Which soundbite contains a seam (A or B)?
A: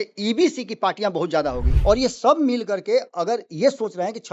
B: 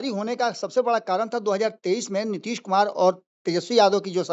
A